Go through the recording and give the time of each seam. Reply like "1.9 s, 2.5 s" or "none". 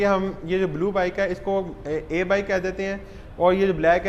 none